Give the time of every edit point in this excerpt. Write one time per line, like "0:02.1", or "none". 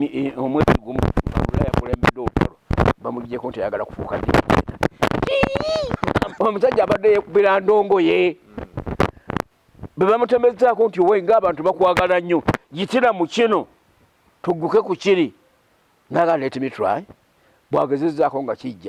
0:06.3